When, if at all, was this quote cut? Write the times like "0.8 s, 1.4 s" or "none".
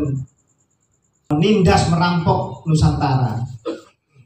1.3 s